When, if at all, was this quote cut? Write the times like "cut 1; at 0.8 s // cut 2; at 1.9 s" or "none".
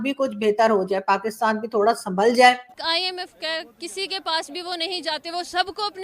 cut 1; at 2.8 s